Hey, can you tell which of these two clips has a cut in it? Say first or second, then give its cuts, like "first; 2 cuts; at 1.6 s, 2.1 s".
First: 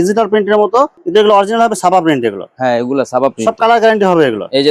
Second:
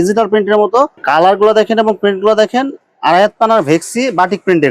second; 1 cut; at 1.0 s